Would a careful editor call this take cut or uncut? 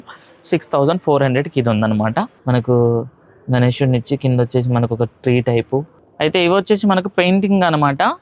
cut